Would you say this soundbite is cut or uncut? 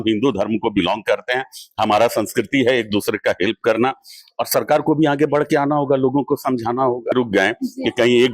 cut